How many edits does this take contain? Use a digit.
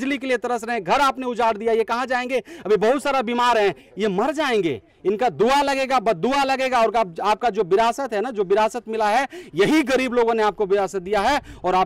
0